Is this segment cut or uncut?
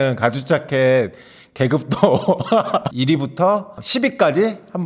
cut